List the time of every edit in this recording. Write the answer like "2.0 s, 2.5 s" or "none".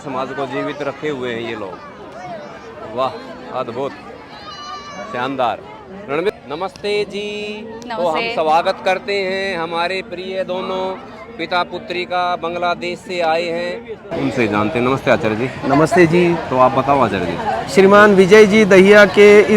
6.3 s, 14.1 s